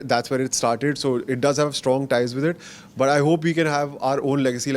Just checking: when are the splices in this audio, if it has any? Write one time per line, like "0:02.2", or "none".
none